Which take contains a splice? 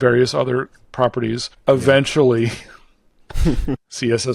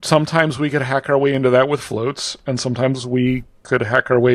first; 1 cut; at 1.5 s

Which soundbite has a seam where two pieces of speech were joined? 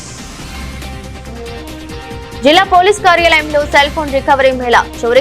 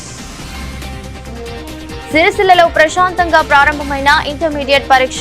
second; 1 cut; at 2.1 s

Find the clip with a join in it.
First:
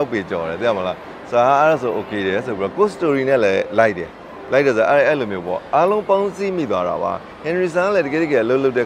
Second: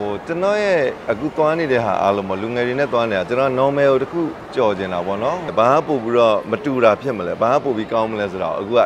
second; 1 cut; at 5.5 s

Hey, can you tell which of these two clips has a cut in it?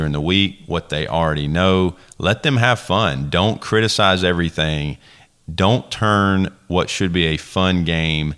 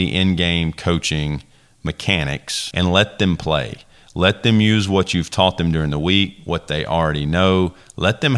second; 1 cut; at 2.6 s

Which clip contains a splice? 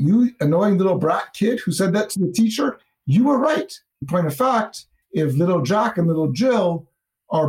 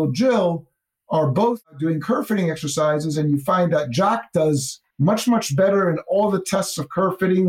first; 1 cut; at 4.1 s

